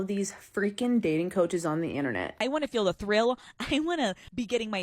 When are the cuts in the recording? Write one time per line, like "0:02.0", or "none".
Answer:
0:02.4